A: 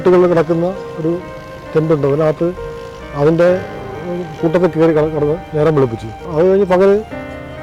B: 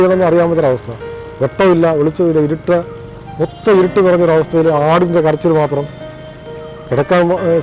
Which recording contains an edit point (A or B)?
A